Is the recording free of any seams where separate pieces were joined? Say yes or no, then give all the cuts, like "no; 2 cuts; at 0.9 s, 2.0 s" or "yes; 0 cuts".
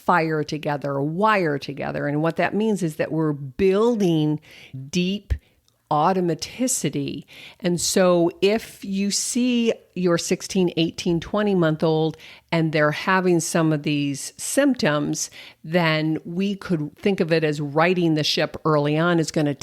no; 1 cut; at 16.9 s